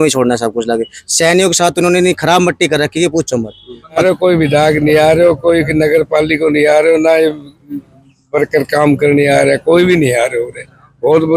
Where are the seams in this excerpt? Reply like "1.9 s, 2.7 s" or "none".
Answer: 4.0 s